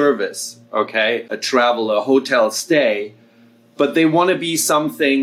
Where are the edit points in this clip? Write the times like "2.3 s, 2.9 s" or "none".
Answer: 1.3 s